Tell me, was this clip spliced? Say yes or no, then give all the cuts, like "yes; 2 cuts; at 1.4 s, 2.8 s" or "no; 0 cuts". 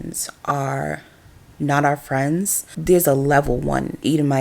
yes; 1 cut; at 2.7 s